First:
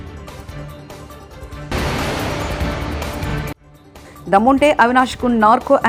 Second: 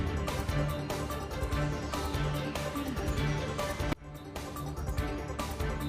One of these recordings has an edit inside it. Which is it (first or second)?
second